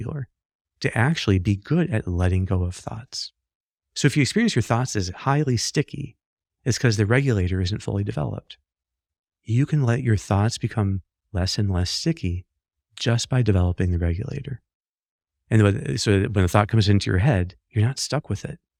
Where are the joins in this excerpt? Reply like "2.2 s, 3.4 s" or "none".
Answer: none